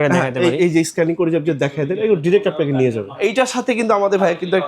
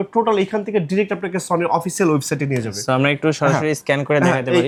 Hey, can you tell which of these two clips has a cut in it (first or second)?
first